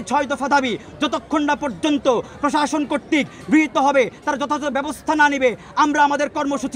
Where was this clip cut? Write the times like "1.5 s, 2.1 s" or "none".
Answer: none